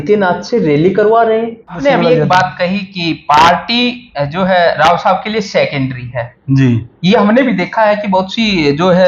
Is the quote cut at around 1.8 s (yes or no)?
yes